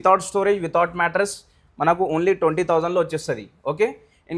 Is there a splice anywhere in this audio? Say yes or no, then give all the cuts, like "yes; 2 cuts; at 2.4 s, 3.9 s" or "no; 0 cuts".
no; 0 cuts